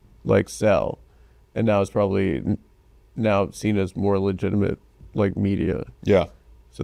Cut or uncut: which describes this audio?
uncut